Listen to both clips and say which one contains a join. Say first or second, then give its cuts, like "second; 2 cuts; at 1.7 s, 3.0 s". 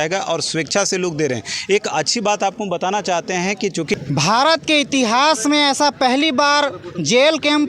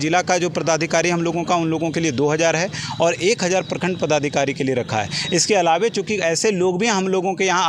first; 1 cut; at 3.9 s